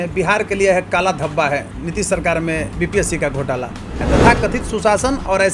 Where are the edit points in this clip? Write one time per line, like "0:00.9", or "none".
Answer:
0:04.0